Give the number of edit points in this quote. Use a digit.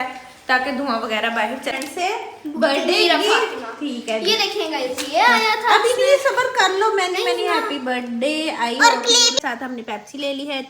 2